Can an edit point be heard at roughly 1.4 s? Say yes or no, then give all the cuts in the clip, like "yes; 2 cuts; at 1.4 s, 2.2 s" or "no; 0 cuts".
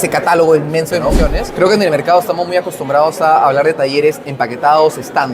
yes; 1 cut; at 1.4 s